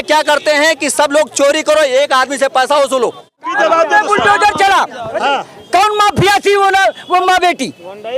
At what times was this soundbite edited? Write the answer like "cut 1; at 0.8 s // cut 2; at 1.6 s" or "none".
cut 1; at 3.4 s